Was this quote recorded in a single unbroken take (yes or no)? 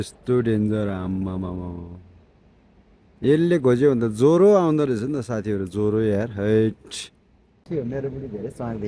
no